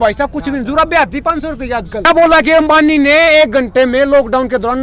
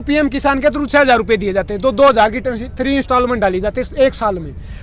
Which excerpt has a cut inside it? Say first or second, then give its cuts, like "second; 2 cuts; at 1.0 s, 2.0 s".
first; 1 cut; at 2.1 s